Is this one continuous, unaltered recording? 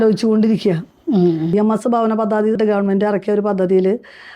no; 2 cuts; at 1.5 s, 2.6 s

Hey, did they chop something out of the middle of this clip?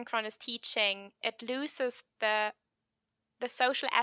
no; 0 cuts

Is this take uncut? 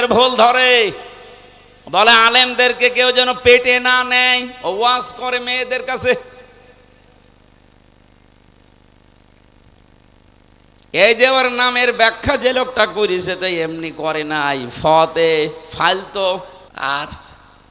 no; 1 cut; at 16.6 s

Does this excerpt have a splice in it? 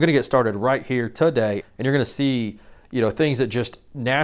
yes; 1 cut; at 1.6 s

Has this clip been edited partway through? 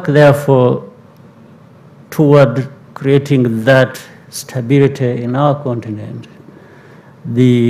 no; 0 cuts

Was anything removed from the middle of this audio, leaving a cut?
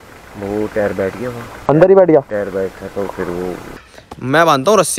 yes; 1 cut; at 3.9 s

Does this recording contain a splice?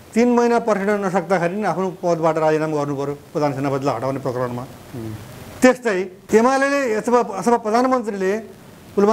yes; 1 cut; at 6.2 s

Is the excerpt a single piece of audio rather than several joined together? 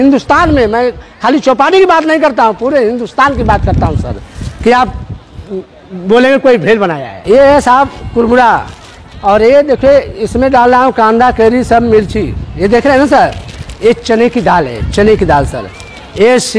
yes; 0 cuts

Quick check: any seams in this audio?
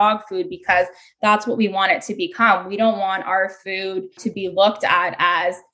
yes; 1 cut; at 4.2 s

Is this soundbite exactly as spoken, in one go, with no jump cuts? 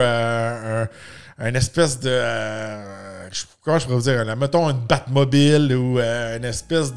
yes; 0 cuts

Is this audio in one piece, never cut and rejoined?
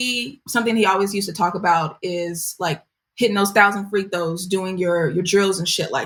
yes; 0 cuts

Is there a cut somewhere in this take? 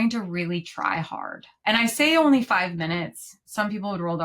yes; 1 cut; at 1.5 s

